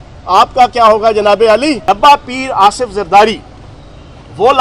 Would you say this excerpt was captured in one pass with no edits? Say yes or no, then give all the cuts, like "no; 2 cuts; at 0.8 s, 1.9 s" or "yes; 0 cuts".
no; 1 cut; at 1.8 s